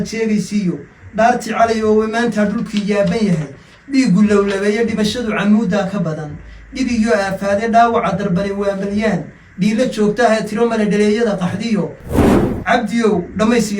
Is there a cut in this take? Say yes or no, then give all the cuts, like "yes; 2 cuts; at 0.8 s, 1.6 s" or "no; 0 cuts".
yes; 1 cut; at 12.3 s